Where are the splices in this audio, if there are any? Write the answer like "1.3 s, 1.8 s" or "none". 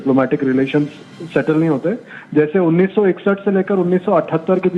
none